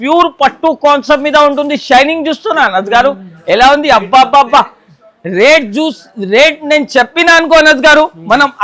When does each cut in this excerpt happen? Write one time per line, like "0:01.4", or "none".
none

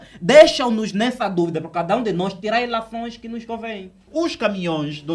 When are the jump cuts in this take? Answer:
0:04.0

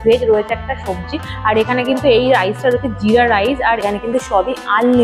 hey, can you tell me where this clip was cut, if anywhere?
0:03.8

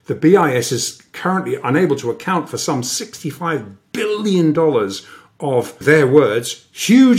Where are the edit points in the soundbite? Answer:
0:05.8

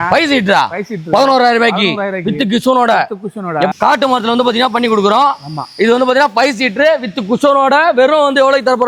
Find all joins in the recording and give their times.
none

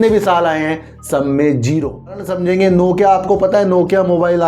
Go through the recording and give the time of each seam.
0:02.3

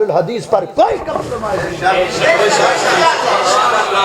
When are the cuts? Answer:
none

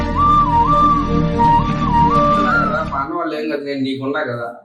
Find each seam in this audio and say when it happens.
0:02.6

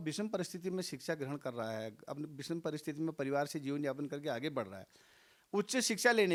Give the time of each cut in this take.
none

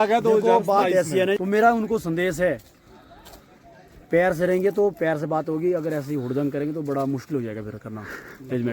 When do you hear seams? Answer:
0:01.4

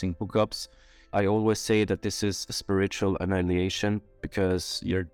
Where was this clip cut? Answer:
0:01.1

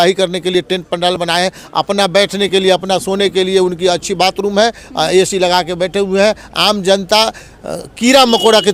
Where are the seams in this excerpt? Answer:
none

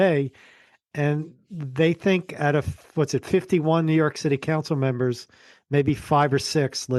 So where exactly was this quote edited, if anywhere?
none

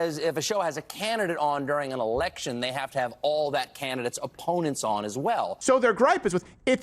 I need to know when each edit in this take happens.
0:05.5

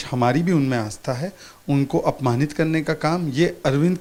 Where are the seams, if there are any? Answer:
none

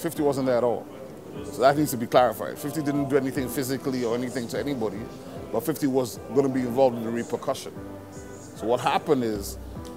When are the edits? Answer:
none

